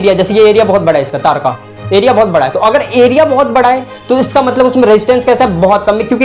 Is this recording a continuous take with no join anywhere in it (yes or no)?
yes